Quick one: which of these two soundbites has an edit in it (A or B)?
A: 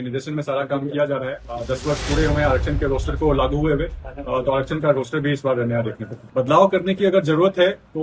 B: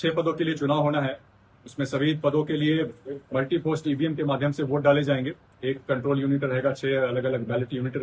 A